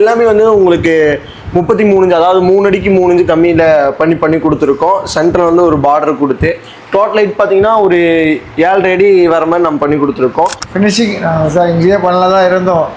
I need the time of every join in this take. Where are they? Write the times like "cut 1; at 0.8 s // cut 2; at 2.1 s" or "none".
cut 1; at 10.6 s